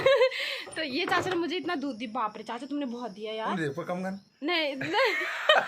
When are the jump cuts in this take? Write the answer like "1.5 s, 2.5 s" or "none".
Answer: none